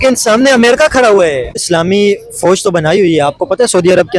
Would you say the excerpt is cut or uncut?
cut